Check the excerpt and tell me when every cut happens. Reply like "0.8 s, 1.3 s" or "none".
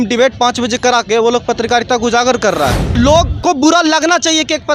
3.0 s